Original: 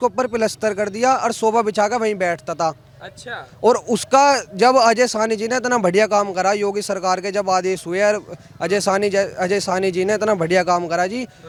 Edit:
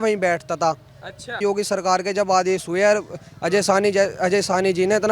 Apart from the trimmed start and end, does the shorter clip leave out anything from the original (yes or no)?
yes